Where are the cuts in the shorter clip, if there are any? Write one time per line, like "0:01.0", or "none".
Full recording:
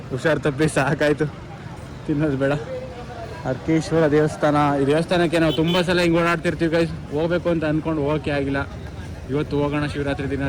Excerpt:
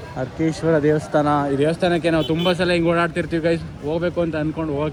none